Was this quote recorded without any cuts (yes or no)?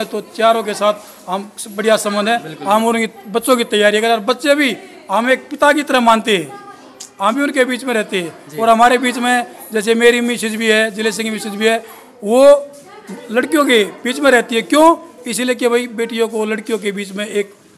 yes